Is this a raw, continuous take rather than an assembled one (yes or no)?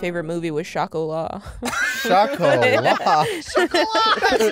yes